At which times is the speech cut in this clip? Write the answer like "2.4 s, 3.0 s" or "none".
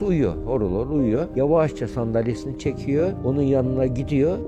1.3 s